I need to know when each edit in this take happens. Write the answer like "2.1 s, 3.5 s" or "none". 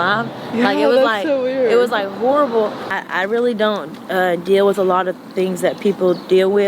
2.9 s